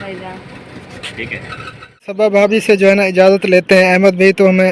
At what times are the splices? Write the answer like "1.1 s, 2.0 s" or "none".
2.2 s